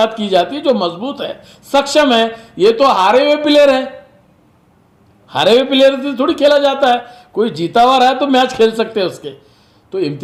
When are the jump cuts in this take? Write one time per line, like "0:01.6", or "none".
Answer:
none